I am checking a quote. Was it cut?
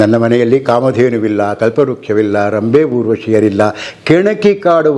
no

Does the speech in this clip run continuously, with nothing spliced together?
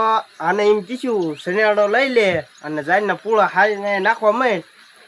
yes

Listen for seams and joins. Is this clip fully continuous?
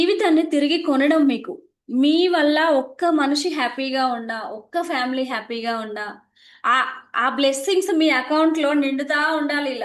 yes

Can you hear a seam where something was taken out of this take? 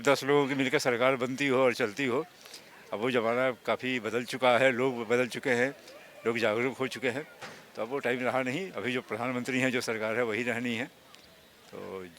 no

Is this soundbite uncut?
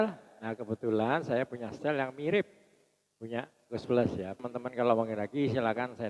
no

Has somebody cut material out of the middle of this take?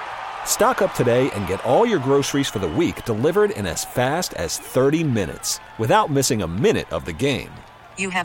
no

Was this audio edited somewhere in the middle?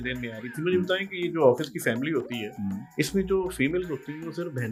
no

